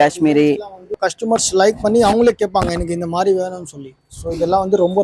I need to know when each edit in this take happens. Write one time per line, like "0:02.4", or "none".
0:01.0